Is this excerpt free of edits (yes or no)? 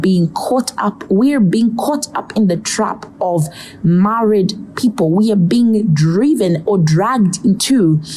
yes